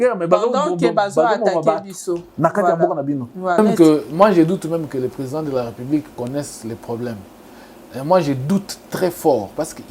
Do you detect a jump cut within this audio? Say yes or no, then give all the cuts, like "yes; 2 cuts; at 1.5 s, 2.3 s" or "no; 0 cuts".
yes; 1 cut; at 3.6 s